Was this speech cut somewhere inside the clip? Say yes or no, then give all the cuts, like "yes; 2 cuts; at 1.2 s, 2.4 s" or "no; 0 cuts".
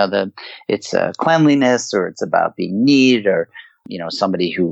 no; 0 cuts